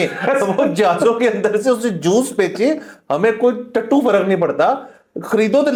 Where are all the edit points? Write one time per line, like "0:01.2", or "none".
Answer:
none